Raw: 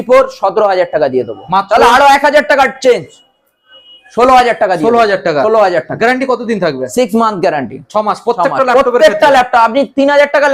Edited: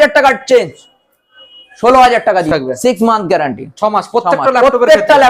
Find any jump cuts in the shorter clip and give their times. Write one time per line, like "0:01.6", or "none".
0:02.5